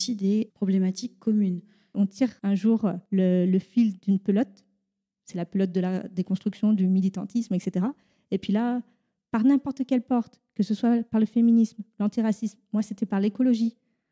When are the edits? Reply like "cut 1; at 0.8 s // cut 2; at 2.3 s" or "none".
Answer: cut 1; at 1.9 s

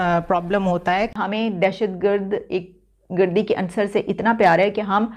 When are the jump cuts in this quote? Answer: cut 1; at 1.1 s

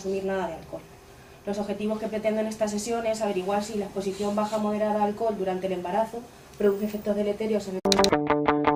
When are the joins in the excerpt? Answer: none

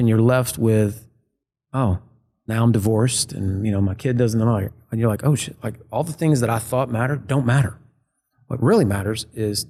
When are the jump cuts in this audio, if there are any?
none

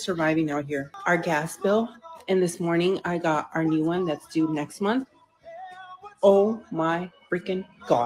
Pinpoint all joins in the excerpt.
cut 1; at 0.9 s

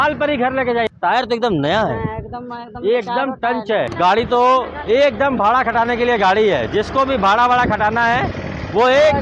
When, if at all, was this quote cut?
cut 1; at 0.9 s // cut 2; at 3.9 s

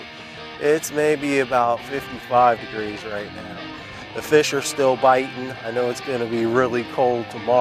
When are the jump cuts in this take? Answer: none

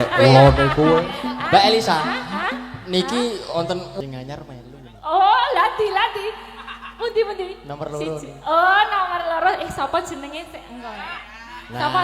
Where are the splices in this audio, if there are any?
cut 1; at 4.0 s

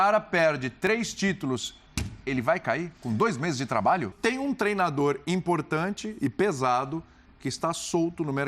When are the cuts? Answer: cut 1; at 4.1 s

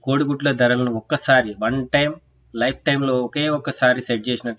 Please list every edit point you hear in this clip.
none

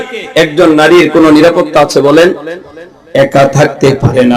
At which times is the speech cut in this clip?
none

